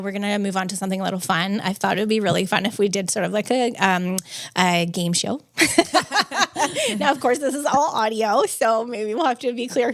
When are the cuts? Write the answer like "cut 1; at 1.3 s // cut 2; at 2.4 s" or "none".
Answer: none